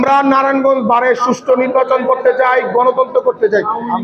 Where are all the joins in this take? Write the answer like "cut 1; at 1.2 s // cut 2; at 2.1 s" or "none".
none